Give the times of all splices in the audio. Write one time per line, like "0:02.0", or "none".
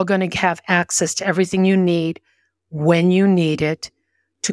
none